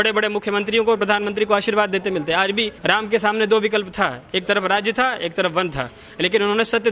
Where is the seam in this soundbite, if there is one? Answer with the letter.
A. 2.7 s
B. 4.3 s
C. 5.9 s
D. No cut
A